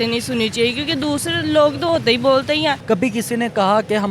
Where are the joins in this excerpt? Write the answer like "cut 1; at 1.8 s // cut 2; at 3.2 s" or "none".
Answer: cut 1; at 2.8 s